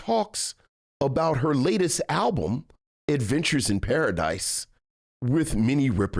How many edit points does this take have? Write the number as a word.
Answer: zero